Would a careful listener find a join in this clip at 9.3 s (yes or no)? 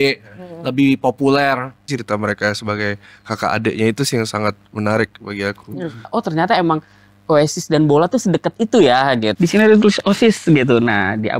yes